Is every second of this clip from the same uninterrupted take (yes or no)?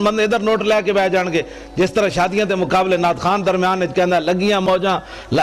yes